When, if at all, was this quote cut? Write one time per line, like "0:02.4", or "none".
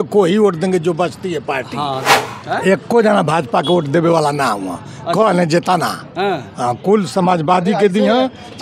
0:02.1